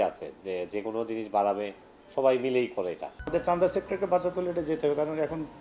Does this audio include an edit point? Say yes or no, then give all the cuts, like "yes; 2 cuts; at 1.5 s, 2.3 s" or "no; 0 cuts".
yes; 1 cut; at 3.1 s